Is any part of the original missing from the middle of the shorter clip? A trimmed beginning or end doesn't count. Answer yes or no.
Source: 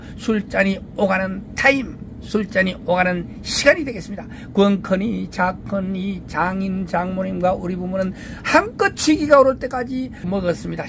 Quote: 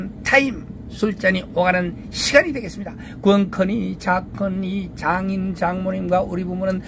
no